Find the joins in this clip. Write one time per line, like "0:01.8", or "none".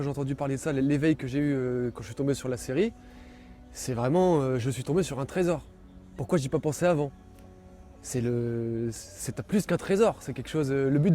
none

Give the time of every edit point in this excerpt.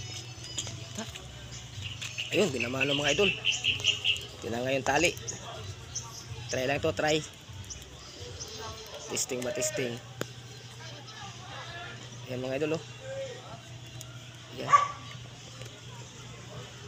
none

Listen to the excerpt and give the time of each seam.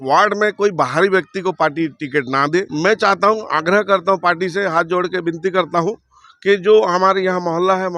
0:02.7

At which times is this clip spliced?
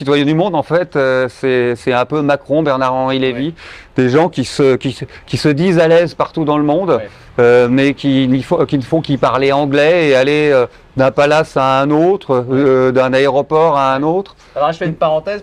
none

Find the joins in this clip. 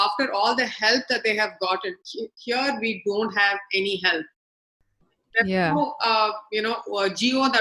none

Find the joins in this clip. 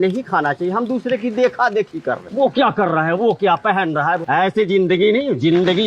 0:02.2
0:04.2

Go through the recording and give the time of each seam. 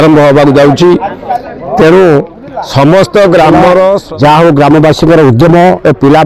0:04.0

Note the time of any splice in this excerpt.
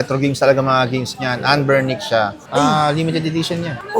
0:02.4

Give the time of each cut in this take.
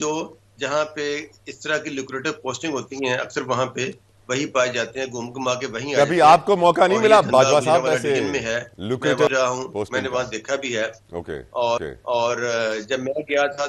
none

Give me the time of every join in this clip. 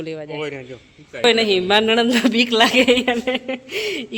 0:01.2

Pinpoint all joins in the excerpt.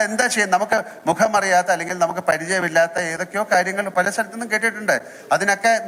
none

